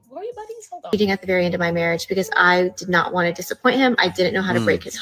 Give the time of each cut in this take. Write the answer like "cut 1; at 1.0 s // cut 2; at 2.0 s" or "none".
cut 1; at 0.9 s